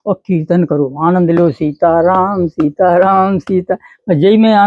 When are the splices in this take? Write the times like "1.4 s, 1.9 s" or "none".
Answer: none